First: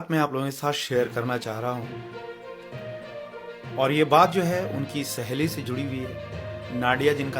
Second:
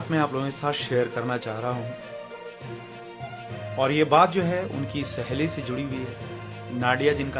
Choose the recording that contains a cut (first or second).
first